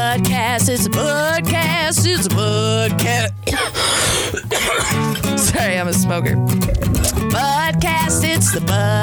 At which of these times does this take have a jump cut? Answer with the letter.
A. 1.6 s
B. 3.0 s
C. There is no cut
C